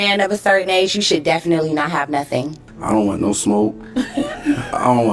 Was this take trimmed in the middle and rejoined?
yes; 1 cut; at 2.7 s

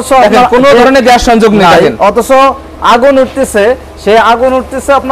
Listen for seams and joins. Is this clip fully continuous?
yes; 0 cuts

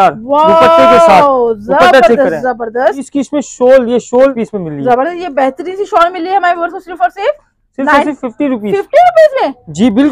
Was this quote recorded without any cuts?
no; 2 cuts; at 3.1 s, 4.4 s

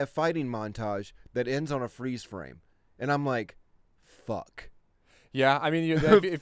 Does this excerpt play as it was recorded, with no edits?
yes; 0 cuts

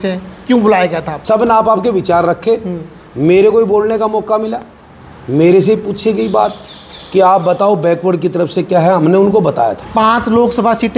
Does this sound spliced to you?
yes; 2 cuts; at 1.1 s, 9.8 s

